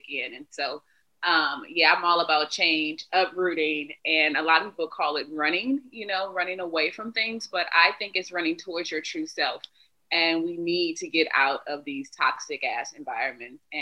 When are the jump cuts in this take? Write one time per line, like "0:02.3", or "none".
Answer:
none

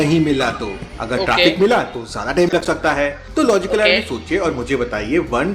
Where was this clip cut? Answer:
none

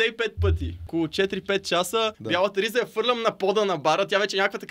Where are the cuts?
0:00.8
0:02.2

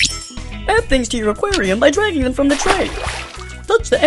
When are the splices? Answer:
none

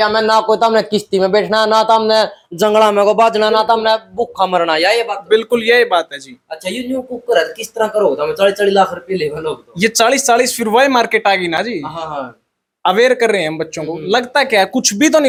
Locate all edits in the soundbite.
none

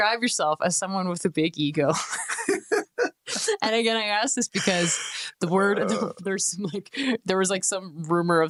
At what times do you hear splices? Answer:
none

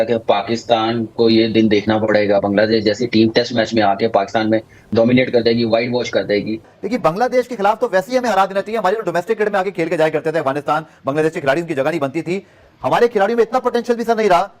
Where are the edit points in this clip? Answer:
0:06.6

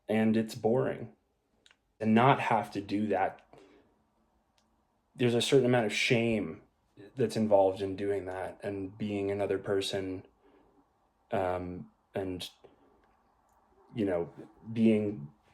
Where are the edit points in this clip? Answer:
0:02.0

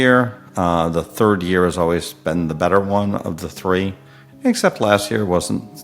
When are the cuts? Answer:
none

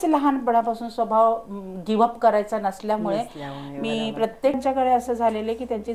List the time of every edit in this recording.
0:04.6

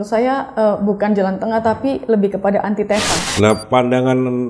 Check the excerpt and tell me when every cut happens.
0:03.2

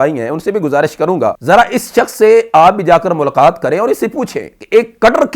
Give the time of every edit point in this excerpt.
0:01.4

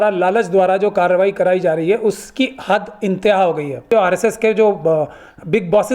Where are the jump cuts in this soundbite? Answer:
0:03.9

